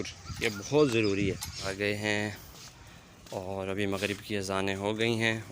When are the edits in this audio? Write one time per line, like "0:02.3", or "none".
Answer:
0:01.6